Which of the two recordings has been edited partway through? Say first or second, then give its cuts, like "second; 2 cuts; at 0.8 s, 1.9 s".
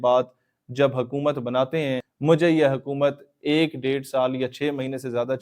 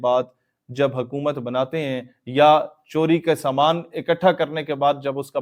first; 1 cut; at 2.1 s